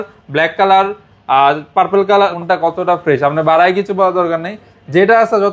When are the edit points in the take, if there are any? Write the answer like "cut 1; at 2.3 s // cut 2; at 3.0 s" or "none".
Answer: cut 1; at 2.3 s